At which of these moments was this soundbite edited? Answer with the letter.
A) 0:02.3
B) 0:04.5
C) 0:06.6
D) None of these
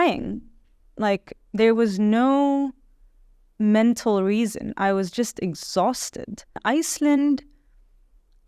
C